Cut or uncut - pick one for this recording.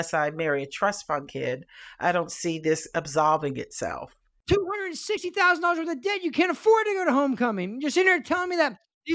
cut